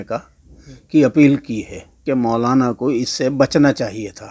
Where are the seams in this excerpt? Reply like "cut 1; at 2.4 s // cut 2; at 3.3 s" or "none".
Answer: cut 1; at 2.0 s